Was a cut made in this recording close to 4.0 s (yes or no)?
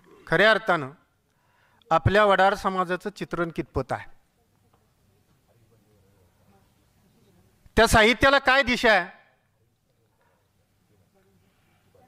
no